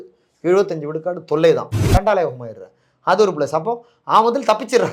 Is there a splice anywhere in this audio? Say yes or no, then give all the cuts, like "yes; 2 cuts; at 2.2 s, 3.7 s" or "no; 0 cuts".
yes; 1 cut; at 1.8 s